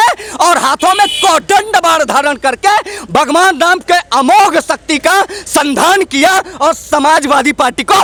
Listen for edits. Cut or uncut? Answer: uncut